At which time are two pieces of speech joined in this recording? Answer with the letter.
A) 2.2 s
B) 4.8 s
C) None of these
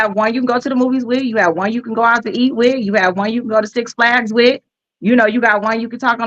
C